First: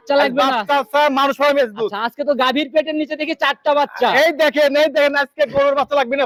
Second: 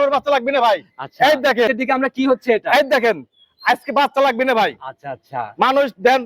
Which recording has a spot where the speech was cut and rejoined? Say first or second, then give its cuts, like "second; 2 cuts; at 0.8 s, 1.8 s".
second; 1 cut; at 1.7 s